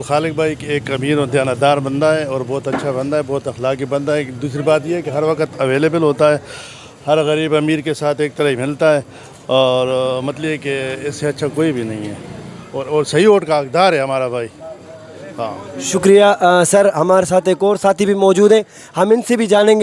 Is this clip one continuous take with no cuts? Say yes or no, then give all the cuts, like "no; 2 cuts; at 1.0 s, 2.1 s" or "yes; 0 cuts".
yes; 0 cuts